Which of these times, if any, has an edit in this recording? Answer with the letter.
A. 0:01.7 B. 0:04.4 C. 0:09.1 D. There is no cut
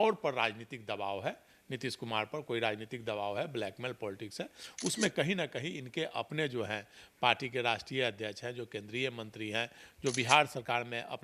D